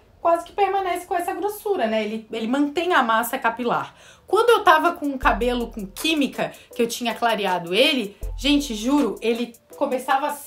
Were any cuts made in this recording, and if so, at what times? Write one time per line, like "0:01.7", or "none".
none